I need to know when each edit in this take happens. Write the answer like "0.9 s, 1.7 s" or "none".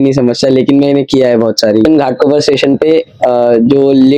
1.9 s